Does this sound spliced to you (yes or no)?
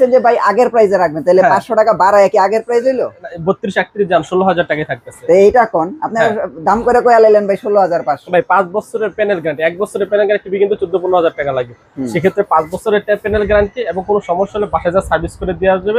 no